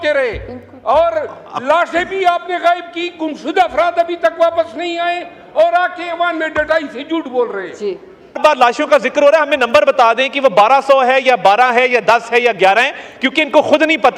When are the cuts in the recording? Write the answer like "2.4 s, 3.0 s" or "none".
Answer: 8.4 s